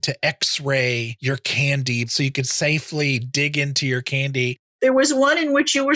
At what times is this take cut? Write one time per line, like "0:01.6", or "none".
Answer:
0:01.1
0:02.1
0:04.6